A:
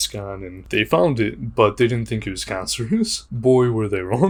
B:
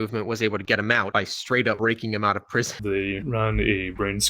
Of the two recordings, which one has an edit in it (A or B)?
B